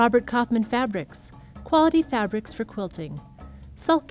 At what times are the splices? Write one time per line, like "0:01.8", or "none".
none

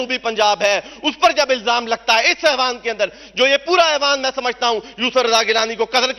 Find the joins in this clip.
none

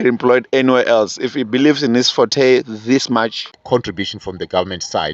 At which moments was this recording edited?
0:03.5

